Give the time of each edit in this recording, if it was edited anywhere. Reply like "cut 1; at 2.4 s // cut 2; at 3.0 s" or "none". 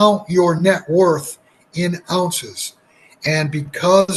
none